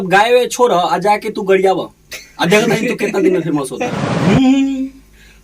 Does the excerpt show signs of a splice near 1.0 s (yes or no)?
no